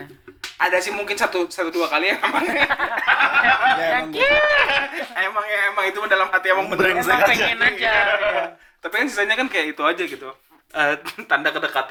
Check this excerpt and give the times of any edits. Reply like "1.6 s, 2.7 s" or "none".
none